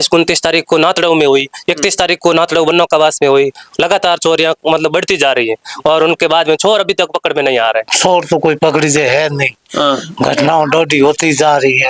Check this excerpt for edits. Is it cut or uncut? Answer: cut